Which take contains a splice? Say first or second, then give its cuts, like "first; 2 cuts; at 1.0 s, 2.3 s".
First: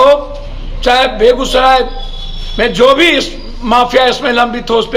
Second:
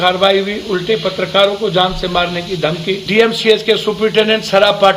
second; 1 cut; at 3.0 s